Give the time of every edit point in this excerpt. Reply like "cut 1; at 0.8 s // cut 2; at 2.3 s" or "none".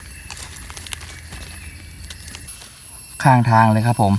cut 1; at 2.5 s